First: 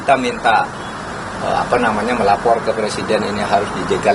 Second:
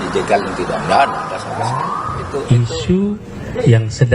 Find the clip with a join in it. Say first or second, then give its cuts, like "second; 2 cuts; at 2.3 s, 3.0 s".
second; 1 cut; at 2.4 s